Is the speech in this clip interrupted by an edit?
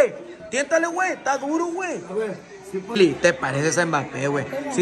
yes; 1 cut; at 2.9 s

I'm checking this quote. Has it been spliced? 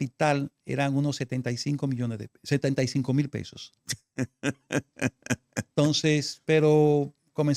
no; 0 cuts

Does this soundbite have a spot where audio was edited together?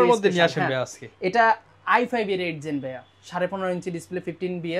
no; 0 cuts

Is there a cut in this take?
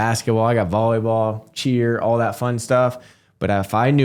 no; 0 cuts

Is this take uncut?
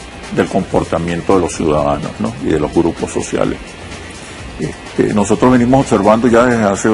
no; 1 cut; at 5.4 s

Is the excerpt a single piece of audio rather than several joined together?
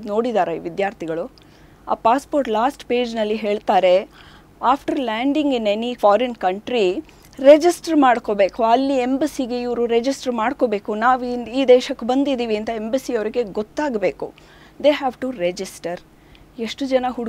yes; 0 cuts

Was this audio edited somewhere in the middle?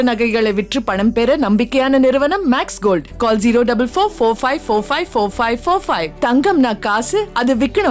no; 0 cuts

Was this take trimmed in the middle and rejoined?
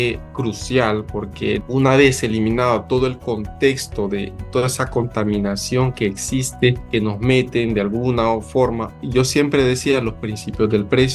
yes; 3 cuts; at 1.6 s, 6.8 s, 9.0 s

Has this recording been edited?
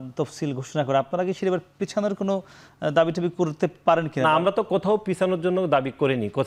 no; 0 cuts

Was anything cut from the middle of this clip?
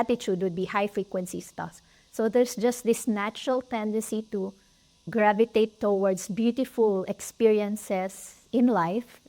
yes; 1 cut; at 5.1 s

